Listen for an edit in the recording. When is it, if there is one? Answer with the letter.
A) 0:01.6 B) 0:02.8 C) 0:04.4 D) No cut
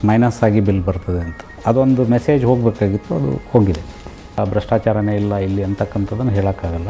C